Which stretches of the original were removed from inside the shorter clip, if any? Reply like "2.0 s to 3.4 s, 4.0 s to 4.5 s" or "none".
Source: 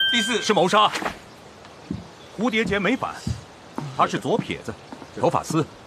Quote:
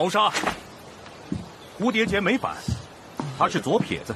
none